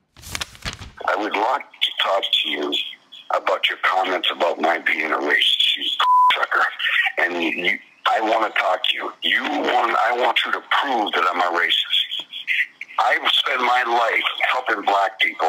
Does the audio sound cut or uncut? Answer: cut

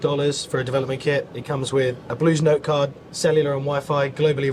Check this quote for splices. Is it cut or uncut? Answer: cut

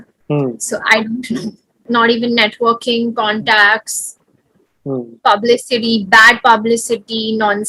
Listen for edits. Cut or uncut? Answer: cut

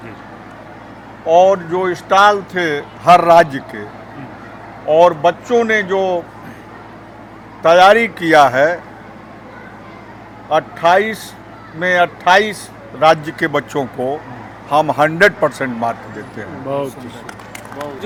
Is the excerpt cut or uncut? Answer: uncut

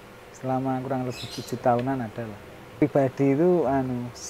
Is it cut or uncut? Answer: cut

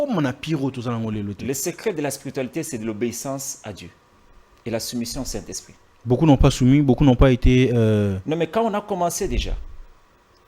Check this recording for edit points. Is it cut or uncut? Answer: uncut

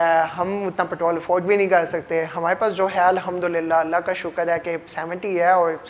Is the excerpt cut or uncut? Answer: uncut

